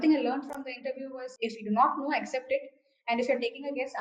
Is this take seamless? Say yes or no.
no